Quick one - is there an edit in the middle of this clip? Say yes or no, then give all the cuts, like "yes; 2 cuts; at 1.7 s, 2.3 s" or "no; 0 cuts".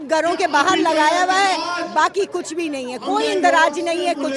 no; 0 cuts